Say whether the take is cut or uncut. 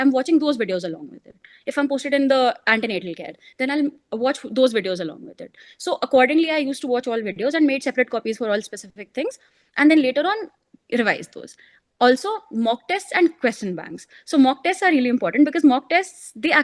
uncut